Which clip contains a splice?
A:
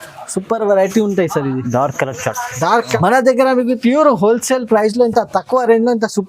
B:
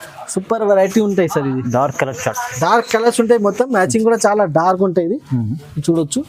A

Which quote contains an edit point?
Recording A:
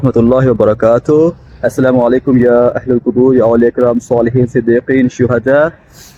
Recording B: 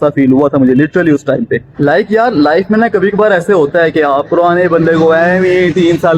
B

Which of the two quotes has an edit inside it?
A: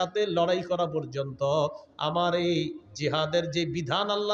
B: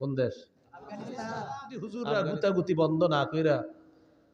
B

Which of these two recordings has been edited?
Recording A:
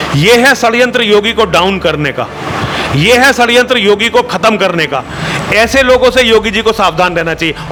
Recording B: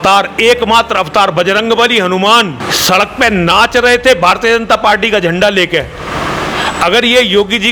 B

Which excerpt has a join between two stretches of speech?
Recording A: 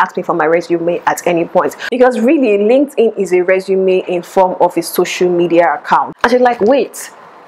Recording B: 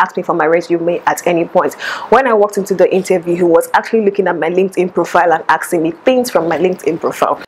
A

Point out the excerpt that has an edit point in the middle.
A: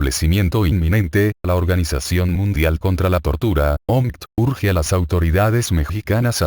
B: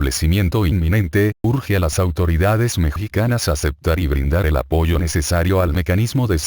B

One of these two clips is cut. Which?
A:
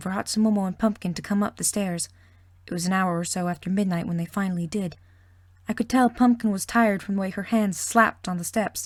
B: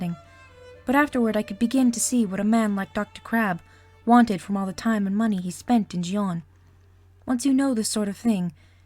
B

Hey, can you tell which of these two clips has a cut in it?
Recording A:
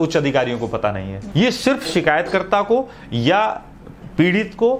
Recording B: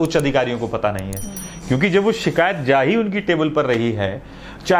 A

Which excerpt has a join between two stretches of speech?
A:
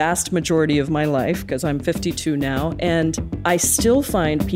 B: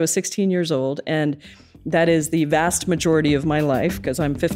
A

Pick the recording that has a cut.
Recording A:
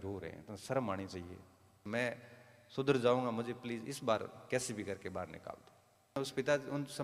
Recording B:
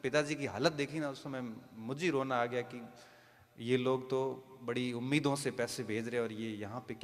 A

